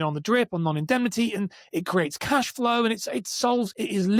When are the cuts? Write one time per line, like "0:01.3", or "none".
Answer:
none